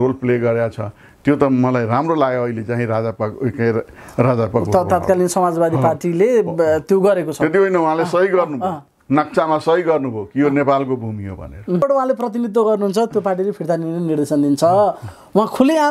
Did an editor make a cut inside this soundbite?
yes; 1 cut; at 11.8 s

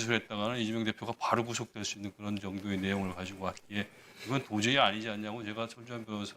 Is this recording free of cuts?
yes; 0 cuts

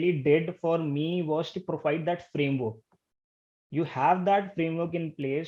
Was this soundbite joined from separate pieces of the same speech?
no; 0 cuts

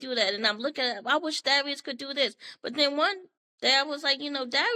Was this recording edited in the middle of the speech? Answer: no; 0 cuts

